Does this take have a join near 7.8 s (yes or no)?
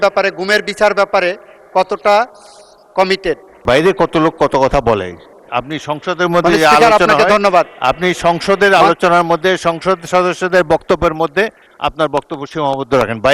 no